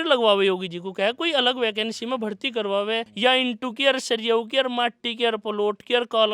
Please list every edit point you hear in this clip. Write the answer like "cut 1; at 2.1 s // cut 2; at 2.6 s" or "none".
cut 1; at 3.1 s